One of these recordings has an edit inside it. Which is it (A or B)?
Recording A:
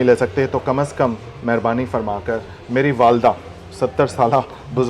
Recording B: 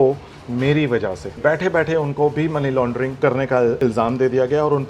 B